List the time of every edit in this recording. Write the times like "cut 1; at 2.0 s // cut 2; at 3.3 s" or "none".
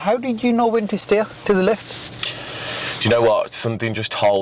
none